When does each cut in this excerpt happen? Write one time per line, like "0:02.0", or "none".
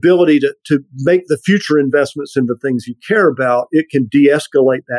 none